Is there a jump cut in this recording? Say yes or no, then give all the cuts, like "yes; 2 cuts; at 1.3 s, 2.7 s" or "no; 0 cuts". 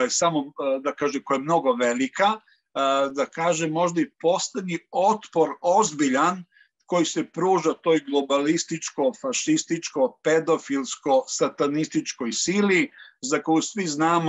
no; 0 cuts